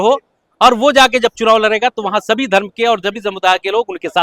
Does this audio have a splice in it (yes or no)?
no